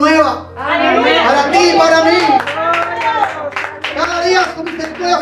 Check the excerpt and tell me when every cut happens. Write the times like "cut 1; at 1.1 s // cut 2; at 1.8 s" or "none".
none